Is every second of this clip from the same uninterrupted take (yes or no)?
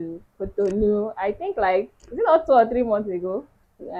yes